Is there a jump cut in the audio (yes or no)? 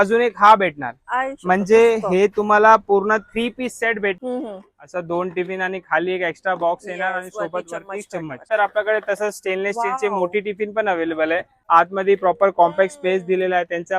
yes